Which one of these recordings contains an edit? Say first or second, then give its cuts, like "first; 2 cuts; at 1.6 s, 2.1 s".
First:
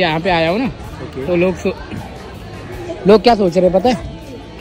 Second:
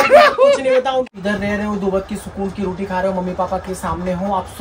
second; 1 cut; at 1.2 s